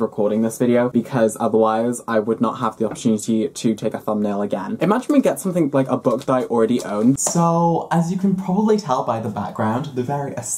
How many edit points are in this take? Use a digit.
2